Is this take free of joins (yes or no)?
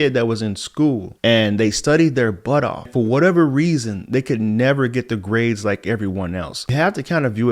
no